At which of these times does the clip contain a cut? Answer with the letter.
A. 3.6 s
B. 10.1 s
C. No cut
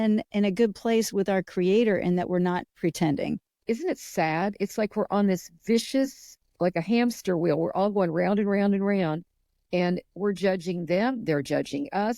A